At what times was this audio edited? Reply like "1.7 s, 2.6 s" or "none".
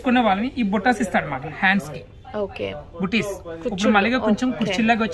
none